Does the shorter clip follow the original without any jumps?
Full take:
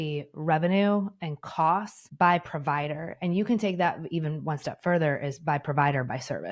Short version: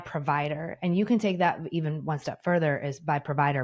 yes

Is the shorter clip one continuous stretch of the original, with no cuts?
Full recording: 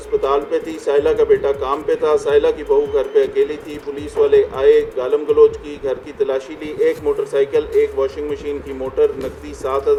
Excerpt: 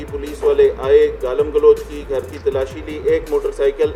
yes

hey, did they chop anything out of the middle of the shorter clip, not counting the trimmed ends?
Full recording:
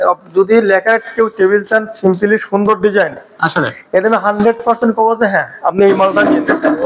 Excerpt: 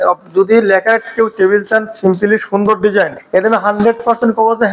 yes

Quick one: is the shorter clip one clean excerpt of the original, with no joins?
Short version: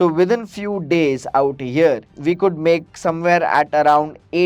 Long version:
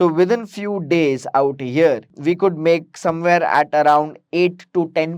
yes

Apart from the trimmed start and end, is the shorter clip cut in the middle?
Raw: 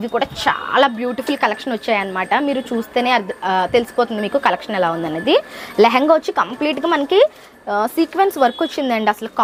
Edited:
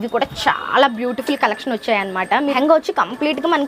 yes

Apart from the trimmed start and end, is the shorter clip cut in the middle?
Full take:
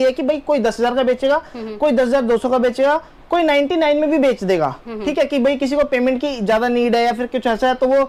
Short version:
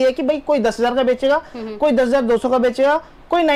no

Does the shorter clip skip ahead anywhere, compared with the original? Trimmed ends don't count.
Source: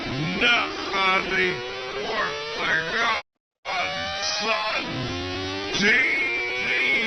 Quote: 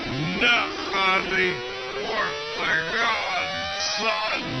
yes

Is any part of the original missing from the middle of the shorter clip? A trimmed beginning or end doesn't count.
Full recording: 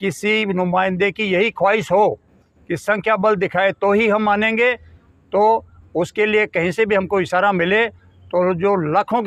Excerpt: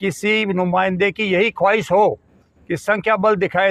no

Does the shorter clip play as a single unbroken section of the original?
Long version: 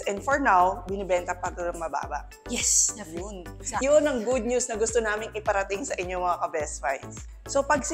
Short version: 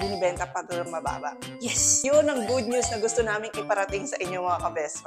no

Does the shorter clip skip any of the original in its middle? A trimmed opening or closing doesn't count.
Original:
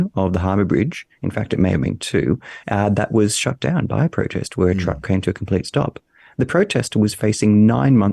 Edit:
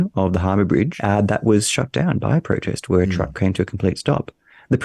yes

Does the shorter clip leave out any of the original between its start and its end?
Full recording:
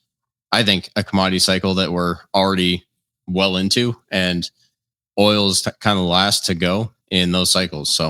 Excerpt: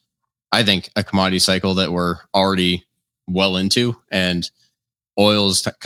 no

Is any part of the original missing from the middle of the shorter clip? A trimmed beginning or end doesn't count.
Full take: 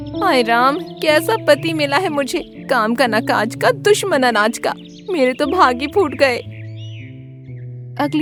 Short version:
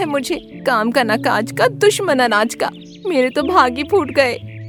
no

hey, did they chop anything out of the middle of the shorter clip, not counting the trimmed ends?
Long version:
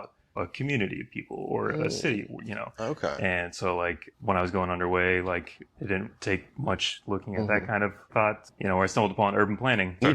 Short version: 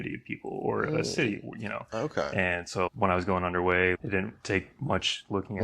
yes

